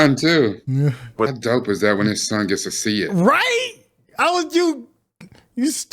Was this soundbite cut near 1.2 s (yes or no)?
yes